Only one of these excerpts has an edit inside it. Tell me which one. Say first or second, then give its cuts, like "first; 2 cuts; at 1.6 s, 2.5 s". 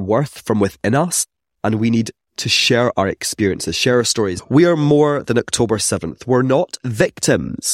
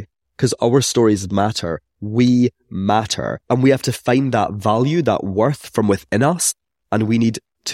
second; 1 cut; at 3.4 s